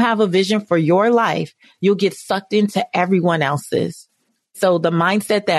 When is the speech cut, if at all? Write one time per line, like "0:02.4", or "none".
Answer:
0:04.6